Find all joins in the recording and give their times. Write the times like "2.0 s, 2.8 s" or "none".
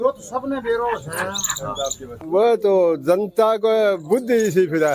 2.1 s